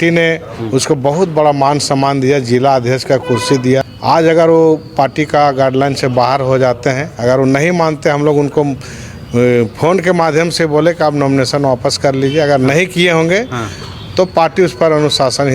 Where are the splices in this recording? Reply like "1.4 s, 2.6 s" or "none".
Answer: 3.9 s

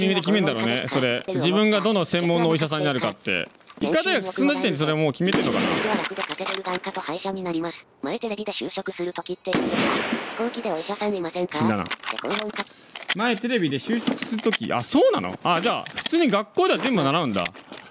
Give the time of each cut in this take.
none

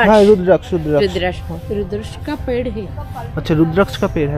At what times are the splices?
none

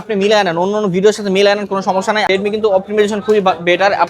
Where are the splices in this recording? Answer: 2.2 s

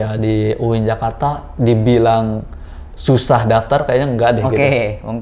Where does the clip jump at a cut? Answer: none

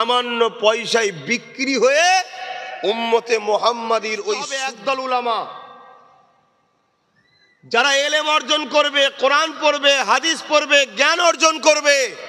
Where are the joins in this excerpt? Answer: 4.6 s

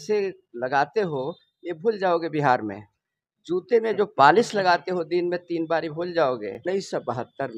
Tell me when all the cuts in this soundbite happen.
6.6 s

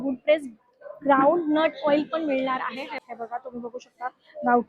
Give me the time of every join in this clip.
2.9 s

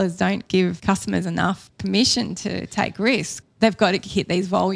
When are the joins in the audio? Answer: 0.8 s, 1.7 s, 3.3 s

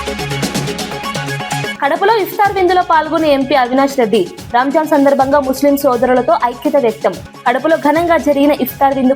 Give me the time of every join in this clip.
1.7 s

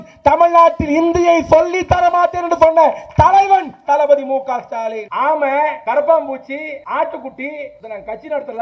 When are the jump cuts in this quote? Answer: 5.0 s, 5.8 s, 6.8 s, 7.8 s

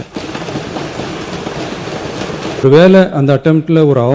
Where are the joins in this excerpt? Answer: 2.6 s

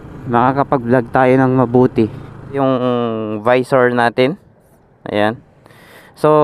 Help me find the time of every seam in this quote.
2.6 s

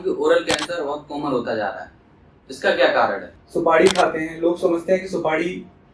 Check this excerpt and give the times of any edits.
3.3 s

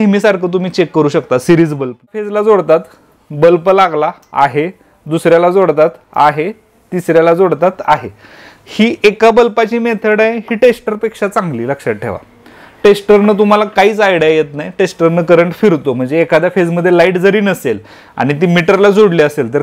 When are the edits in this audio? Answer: 2.2 s

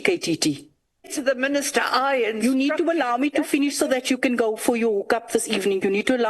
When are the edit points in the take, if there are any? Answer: 1.1 s

